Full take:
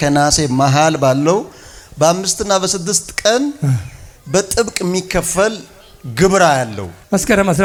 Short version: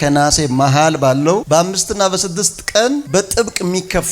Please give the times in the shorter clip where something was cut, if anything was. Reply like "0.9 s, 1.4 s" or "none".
1.4 s, 3.0 s